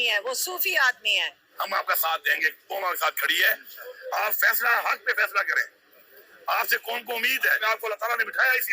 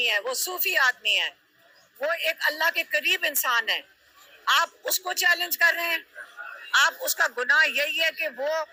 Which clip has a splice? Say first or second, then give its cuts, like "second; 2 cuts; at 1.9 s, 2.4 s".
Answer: first; 2 cuts; at 1.4 s, 7.6 s